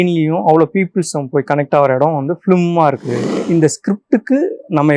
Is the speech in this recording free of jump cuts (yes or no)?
no